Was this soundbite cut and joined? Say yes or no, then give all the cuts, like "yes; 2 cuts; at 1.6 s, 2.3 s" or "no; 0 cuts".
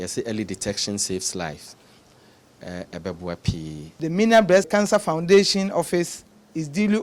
yes; 2 cuts; at 4.0 s, 4.7 s